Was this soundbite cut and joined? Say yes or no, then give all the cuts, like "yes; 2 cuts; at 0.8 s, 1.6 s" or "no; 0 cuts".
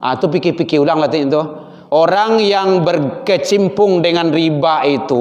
no; 0 cuts